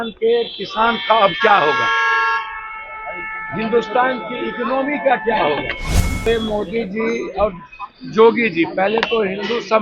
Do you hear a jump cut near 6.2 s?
yes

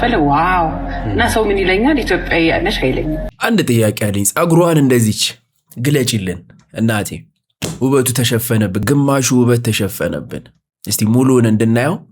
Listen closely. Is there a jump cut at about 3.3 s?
yes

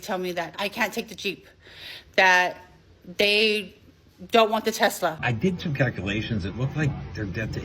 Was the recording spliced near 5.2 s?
yes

